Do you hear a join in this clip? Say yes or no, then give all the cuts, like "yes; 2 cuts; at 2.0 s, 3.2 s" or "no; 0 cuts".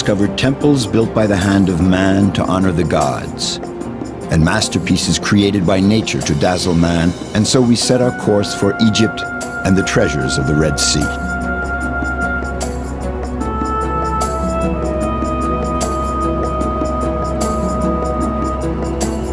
no; 0 cuts